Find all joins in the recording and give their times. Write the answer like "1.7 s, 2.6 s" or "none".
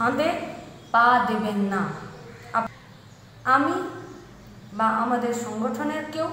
2.7 s